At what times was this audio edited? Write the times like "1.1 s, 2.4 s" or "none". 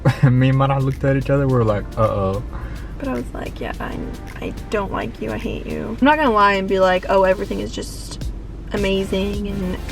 2.9 s, 6.0 s